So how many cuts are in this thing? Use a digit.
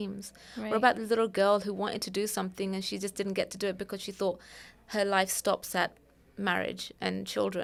0